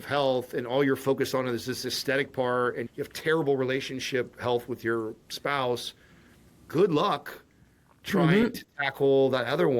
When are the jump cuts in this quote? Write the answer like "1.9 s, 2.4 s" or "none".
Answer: 2.8 s